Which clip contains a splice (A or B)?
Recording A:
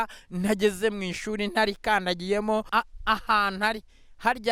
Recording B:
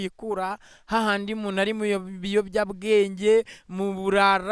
A